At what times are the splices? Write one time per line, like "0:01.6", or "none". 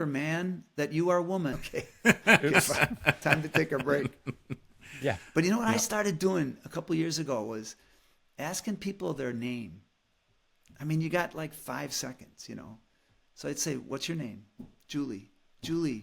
none